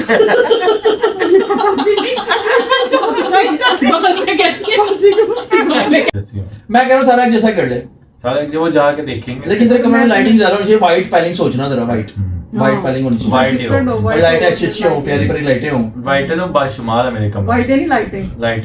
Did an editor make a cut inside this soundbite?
yes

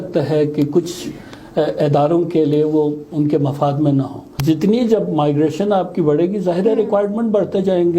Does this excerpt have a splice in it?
yes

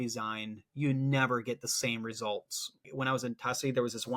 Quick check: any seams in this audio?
yes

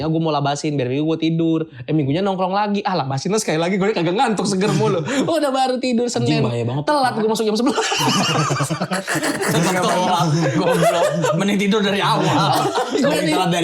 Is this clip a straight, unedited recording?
yes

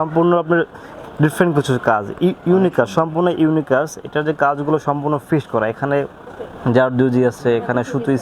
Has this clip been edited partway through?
no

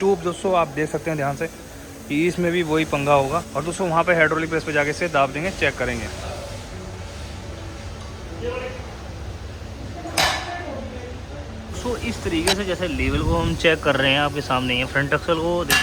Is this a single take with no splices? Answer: yes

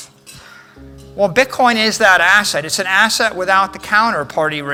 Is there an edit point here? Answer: no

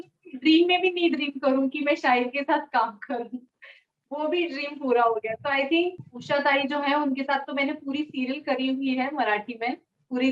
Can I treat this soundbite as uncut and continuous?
no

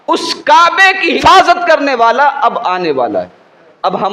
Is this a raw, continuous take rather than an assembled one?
no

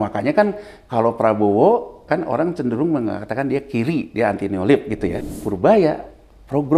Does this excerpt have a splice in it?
yes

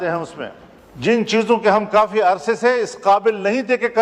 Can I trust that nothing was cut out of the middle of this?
yes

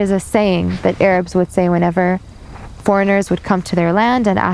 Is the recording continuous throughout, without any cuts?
yes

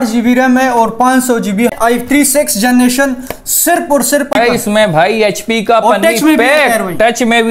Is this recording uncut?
no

